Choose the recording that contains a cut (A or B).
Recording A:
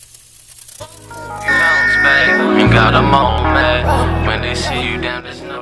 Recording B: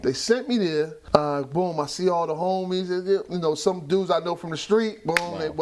B